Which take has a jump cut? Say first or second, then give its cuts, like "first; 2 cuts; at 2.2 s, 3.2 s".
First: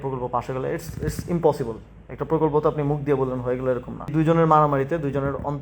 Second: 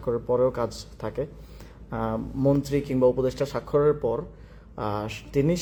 first; 1 cut; at 4.1 s